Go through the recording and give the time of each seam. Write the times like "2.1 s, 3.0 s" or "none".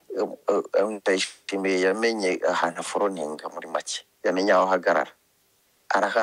none